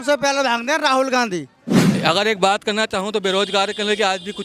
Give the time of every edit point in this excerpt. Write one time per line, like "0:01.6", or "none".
0:01.8

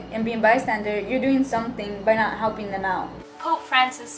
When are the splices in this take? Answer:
0:03.2

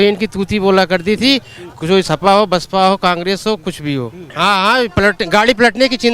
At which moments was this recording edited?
0:04.2

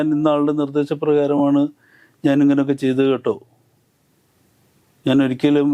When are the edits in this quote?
none

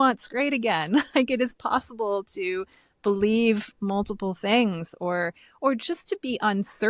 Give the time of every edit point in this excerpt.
none

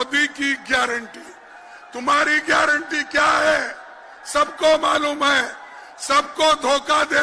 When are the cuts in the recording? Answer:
none

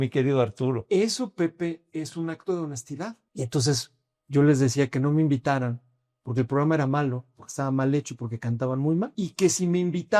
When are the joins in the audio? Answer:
0:03.2
0:09.1

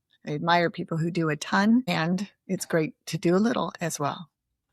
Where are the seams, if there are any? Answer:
0:01.9

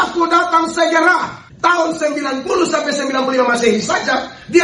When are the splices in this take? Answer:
0:01.4

